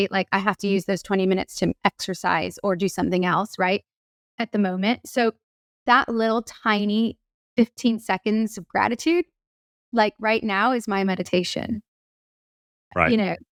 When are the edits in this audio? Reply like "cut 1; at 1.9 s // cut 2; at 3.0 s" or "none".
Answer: none

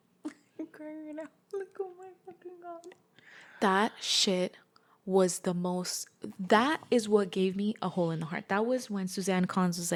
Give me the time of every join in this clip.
none

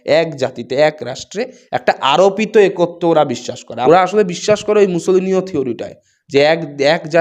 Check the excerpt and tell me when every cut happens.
cut 1; at 3.6 s

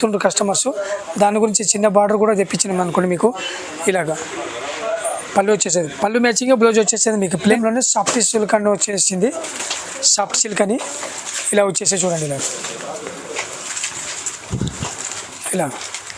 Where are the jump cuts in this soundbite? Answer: cut 1; at 7.5 s

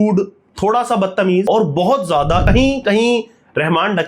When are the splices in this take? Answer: cut 1; at 1.4 s // cut 2; at 2.4 s

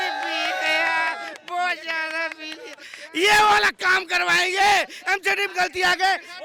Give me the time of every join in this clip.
none

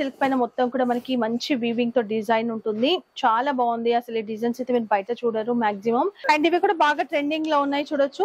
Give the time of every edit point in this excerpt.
cut 1; at 6.2 s

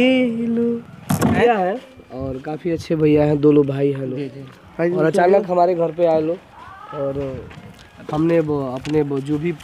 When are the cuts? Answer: none

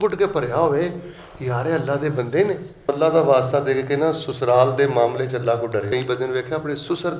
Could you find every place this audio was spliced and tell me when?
cut 1; at 2.9 s // cut 2; at 5.9 s

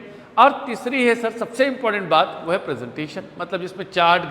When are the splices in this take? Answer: none

